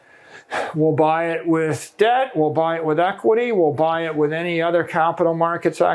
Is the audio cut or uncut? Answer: uncut